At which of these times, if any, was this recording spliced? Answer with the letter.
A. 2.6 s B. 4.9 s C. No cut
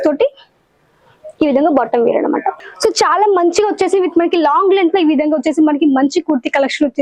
A